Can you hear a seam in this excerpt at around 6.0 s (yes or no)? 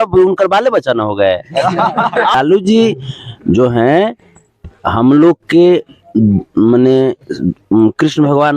no